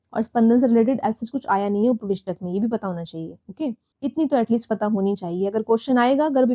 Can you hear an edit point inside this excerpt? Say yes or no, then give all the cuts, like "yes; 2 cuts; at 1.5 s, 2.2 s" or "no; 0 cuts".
yes; 1 cut; at 3.9 s